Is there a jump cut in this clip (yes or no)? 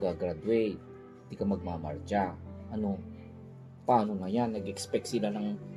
no